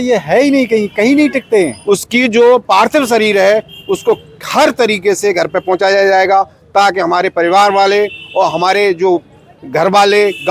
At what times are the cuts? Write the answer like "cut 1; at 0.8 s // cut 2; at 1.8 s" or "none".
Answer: cut 1; at 1.8 s